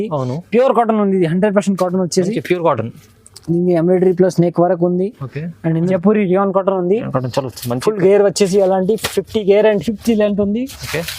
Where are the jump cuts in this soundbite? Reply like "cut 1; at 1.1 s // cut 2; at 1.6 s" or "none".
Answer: cut 1; at 5.9 s